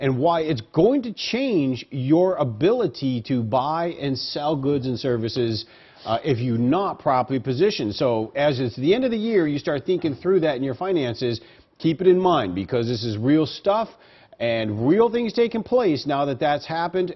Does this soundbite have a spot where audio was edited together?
yes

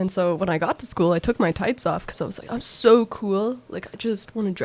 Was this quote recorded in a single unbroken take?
yes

